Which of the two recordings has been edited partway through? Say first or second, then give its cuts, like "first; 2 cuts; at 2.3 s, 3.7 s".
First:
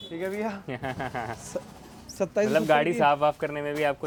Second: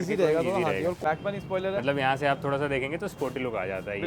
second; 1 cut; at 1.0 s